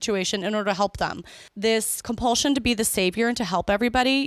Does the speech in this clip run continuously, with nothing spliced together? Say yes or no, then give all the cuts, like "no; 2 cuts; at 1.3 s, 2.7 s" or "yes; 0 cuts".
no; 1 cut; at 1.7 s